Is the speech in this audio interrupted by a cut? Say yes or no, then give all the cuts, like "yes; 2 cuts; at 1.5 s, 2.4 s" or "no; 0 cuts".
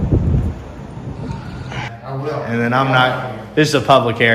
yes; 1 cut; at 1.9 s